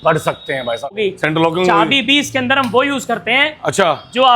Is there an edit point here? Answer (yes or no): yes